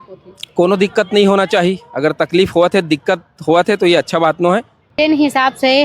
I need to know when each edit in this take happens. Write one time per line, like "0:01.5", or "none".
0:04.8